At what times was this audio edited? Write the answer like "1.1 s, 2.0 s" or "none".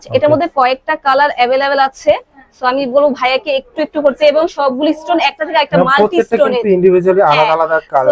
none